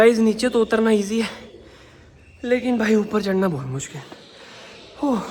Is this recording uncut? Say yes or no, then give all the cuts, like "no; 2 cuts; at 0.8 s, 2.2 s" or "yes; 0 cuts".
yes; 0 cuts